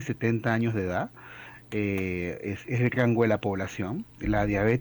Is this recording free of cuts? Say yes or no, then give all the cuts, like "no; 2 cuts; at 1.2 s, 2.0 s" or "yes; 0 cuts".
yes; 0 cuts